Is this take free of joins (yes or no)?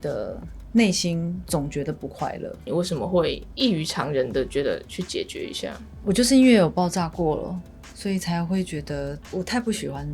no